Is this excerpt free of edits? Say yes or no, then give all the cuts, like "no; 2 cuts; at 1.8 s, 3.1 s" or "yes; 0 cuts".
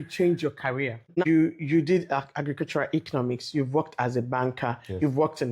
no; 1 cut; at 1.2 s